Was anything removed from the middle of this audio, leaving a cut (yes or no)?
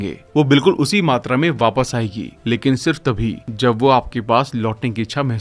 no